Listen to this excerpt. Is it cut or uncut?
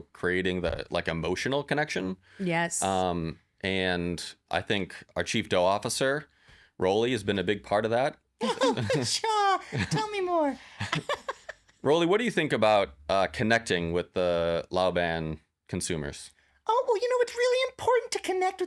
uncut